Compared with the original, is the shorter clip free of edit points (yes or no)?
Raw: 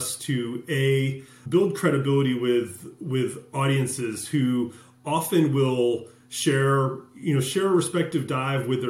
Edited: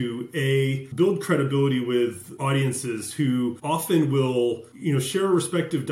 no